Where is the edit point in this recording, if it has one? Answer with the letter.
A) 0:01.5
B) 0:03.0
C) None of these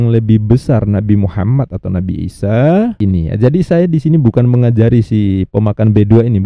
B